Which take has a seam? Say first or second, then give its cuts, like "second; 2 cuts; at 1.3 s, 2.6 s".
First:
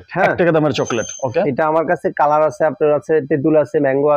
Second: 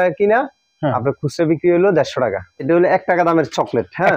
second; 1 cut; at 2.6 s